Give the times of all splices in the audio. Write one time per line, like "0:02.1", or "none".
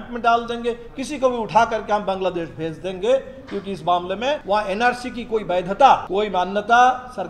0:04.4
0:06.1